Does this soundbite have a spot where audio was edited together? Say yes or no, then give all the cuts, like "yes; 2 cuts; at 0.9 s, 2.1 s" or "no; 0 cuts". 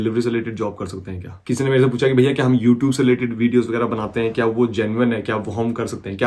yes; 1 cut; at 1.3 s